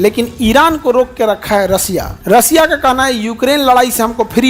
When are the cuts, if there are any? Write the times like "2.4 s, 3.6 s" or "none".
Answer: 2.1 s